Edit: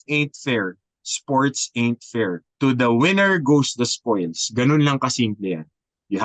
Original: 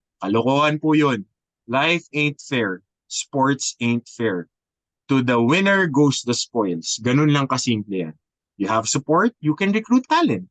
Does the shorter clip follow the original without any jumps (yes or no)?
no